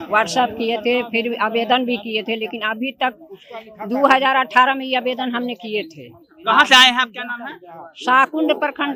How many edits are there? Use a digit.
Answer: 0